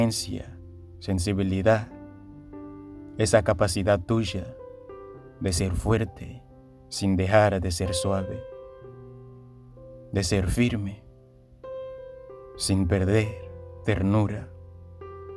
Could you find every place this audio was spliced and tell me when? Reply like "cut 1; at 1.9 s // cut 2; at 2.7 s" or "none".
none

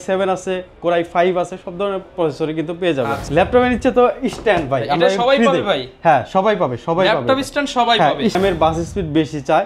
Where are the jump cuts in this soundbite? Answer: cut 1; at 3.2 s // cut 2; at 8.4 s

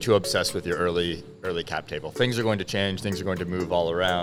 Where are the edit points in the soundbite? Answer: none

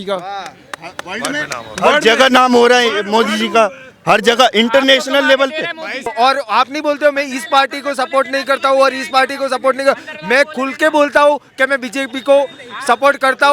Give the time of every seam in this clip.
cut 1; at 6.1 s

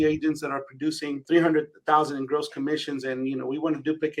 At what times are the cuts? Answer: cut 1; at 1.1 s

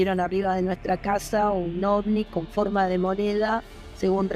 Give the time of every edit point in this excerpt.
none

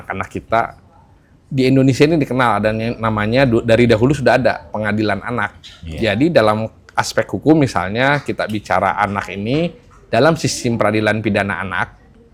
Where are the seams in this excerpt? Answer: none

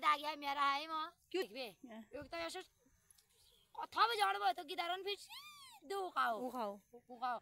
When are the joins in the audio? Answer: cut 1; at 1.4 s

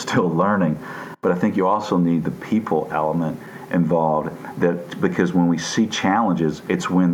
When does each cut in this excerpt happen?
cut 1; at 1.0 s

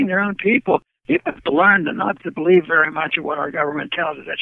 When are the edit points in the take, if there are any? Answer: none

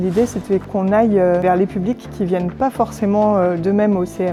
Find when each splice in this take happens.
none

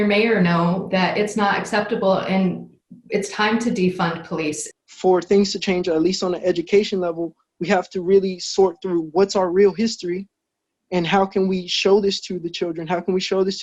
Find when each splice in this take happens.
cut 1; at 4.6 s

